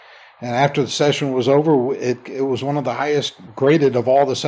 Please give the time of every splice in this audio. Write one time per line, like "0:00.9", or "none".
0:03.4